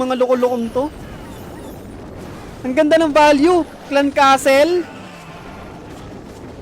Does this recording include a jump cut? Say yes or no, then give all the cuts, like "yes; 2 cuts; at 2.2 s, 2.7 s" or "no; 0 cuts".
no; 0 cuts